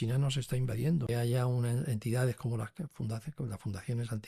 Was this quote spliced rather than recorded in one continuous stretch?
yes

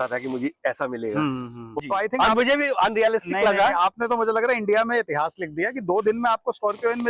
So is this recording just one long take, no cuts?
no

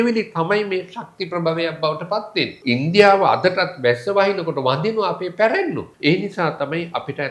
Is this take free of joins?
no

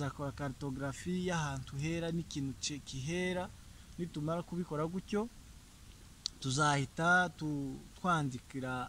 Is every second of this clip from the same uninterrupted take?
yes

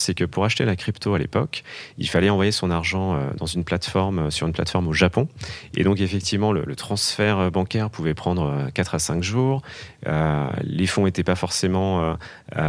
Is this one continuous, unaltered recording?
yes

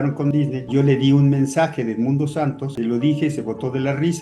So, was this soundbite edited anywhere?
yes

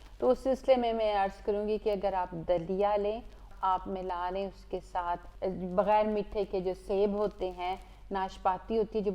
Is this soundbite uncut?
no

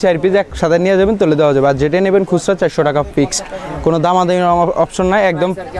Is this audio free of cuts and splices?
yes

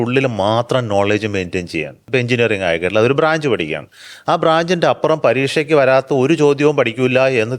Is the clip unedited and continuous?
no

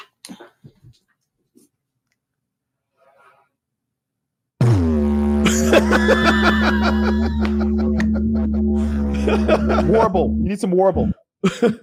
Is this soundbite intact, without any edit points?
yes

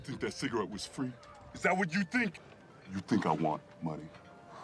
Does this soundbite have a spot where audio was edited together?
no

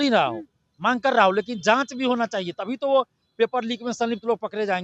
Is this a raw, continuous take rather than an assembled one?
yes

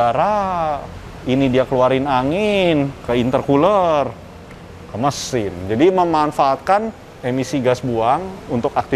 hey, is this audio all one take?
yes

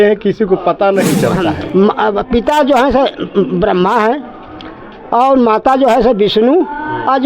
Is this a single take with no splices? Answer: no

